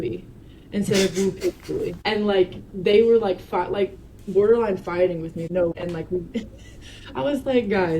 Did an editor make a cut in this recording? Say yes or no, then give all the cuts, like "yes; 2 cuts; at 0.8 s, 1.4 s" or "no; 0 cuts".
yes; 2 cuts; at 1.9 s, 5.5 s